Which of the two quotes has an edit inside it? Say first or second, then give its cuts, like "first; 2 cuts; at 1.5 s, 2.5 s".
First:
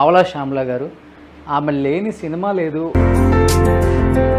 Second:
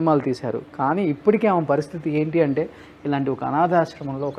first; 1 cut; at 2.9 s